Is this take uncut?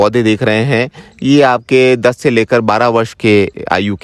yes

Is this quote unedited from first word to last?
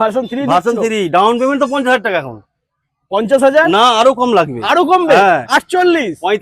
yes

